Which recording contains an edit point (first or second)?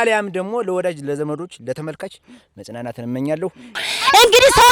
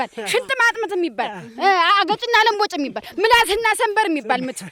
first